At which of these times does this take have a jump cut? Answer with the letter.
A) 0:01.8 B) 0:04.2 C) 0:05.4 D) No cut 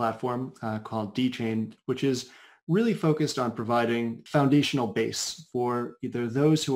B